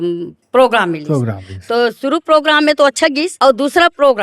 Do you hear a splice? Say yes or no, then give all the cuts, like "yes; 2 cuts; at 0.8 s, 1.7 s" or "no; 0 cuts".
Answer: yes; 1 cut; at 3.3 s